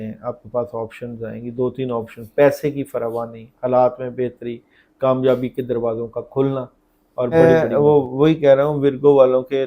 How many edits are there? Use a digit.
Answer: 1